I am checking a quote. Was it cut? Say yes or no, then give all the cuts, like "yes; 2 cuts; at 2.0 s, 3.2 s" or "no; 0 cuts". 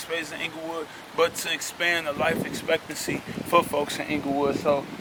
no; 0 cuts